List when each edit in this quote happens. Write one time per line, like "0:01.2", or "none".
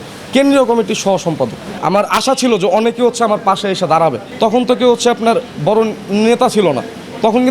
0:01.7
0:04.3